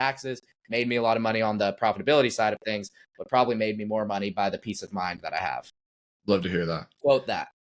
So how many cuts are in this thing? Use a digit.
0